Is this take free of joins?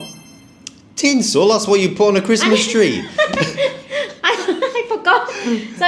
yes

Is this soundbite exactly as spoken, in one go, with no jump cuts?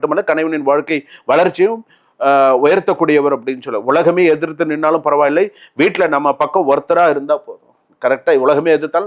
yes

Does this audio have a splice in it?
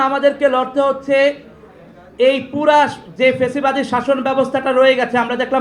no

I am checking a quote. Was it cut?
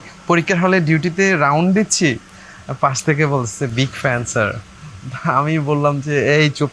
no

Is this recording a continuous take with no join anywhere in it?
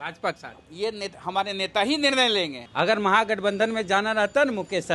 no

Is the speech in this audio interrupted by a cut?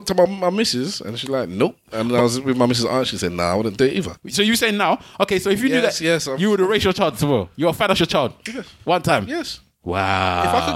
yes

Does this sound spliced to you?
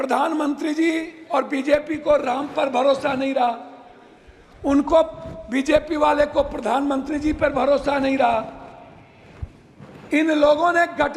no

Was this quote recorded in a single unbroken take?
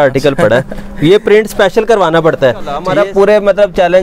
no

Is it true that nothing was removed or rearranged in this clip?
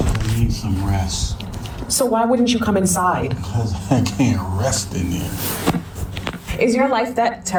yes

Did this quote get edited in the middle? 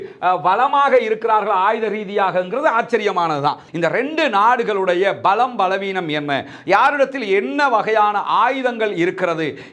yes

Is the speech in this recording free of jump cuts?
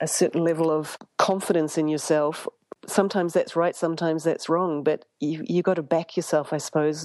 no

